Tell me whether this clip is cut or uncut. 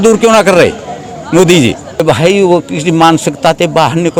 cut